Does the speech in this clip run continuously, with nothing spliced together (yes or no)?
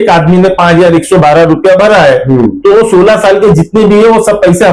yes